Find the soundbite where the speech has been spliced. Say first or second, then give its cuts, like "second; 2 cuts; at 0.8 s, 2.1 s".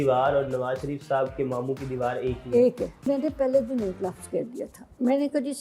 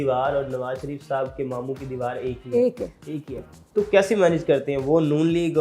first; 1 cut; at 3.0 s